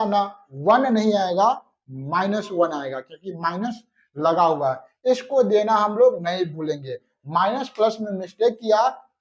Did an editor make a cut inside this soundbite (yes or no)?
no